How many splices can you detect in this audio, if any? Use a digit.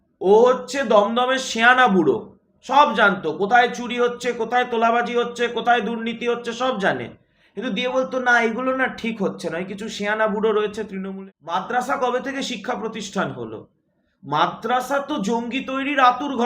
1